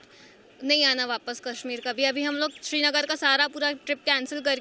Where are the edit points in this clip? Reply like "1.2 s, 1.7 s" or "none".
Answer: none